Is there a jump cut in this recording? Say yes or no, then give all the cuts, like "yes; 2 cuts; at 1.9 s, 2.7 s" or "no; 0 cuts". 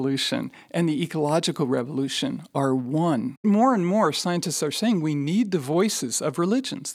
yes; 1 cut; at 3.4 s